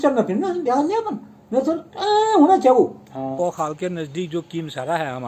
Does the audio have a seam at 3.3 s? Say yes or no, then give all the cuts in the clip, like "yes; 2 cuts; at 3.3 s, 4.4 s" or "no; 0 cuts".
yes; 1 cut; at 3.3 s